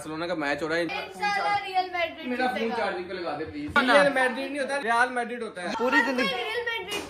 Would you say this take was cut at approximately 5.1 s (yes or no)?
yes